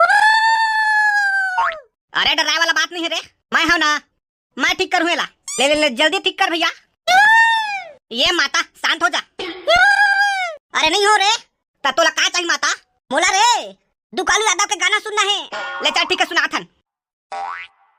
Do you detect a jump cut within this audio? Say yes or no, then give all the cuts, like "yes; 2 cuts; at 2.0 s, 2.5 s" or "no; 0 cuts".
no; 0 cuts